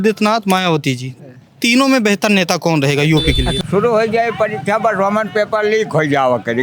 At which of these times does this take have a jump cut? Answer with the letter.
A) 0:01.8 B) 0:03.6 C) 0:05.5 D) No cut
B